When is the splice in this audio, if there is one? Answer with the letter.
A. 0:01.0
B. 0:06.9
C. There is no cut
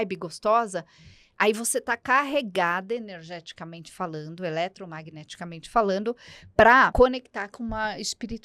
B